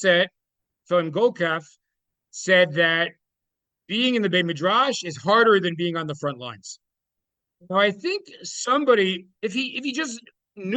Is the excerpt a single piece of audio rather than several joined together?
yes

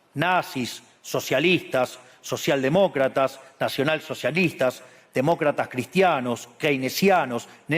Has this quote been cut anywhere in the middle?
no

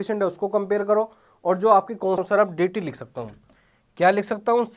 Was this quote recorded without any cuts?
no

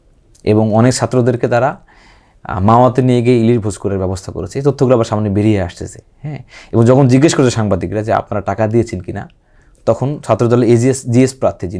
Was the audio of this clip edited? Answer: no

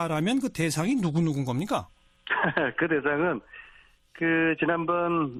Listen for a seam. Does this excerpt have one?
no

